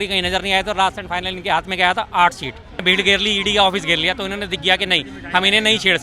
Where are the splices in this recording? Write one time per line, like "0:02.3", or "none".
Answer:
0:02.8